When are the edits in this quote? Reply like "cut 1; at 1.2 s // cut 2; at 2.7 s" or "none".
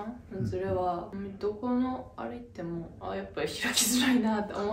cut 1; at 1.1 s // cut 2; at 2.9 s